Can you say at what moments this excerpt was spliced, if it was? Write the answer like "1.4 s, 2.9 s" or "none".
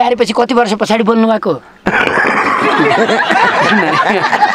1.7 s